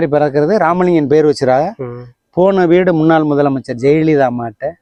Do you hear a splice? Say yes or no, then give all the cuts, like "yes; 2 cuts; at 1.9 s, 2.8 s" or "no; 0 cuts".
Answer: no; 0 cuts